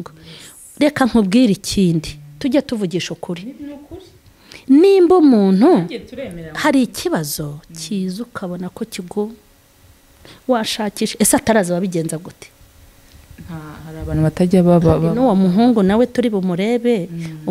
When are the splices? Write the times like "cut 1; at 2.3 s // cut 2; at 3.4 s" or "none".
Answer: none